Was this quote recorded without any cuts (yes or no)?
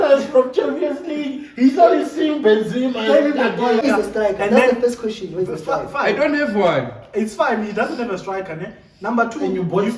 no